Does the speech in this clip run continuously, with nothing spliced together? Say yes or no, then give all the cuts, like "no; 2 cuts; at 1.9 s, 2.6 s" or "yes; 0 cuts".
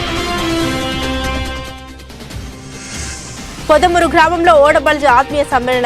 no; 1 cut; at 3.3 s